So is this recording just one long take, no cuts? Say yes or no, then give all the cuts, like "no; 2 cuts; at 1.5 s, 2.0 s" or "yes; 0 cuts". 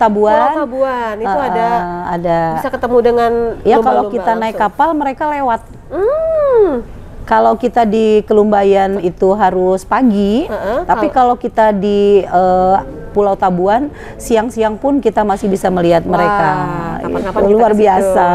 yes; 0 cuts